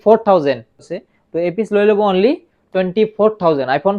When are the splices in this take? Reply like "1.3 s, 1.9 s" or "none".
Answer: 0.9 s